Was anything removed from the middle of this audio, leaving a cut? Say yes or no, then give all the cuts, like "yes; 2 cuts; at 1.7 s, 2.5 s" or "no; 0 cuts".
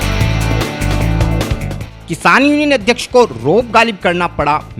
no; 0 cuts